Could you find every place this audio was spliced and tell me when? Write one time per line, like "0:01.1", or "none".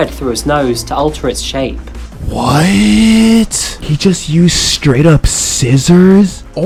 none